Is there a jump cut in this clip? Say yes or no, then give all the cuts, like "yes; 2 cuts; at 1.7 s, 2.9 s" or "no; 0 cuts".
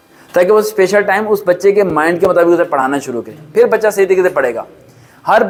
no; 0 cuts